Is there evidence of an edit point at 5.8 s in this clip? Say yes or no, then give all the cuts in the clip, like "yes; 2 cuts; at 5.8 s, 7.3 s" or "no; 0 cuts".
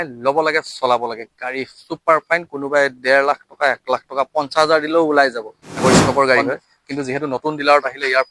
yes; 1 cut; at 5.8 s